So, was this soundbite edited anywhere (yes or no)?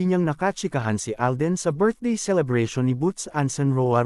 no